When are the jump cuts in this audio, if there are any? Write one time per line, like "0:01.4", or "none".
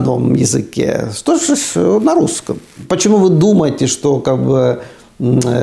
0:02.7